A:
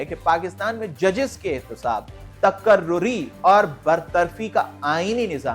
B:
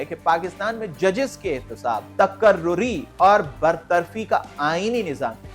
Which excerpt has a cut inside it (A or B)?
B